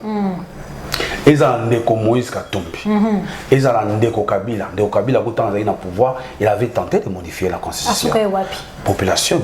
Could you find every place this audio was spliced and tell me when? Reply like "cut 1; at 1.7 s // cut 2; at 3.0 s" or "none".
none